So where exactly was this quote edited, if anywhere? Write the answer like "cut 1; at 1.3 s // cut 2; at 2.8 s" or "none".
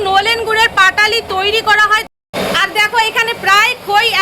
cut 1; at 2.1 s